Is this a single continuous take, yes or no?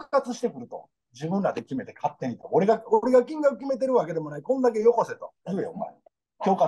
no